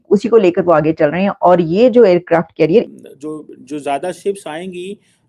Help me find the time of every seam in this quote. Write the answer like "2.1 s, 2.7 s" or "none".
2.8 s